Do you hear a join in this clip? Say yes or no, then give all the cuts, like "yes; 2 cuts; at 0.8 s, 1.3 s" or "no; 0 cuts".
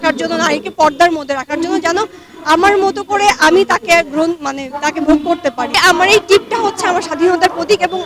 yes; 1 cut; at 5.8 s